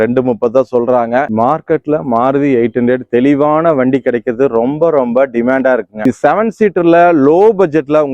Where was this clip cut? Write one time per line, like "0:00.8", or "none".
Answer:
0:01.3
0:06.0